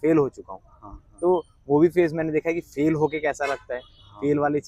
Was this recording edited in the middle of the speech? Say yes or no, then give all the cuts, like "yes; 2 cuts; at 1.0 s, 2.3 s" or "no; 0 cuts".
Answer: no; 0 cuts